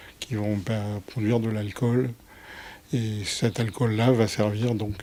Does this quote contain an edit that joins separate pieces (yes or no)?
no